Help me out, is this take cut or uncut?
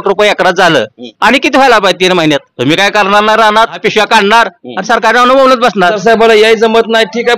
cut